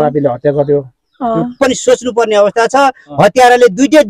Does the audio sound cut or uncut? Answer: cut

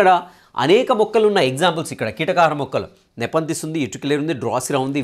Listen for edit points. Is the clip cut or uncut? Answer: uncut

